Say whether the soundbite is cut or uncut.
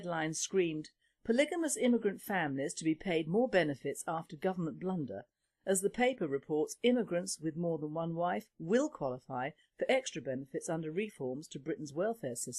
cut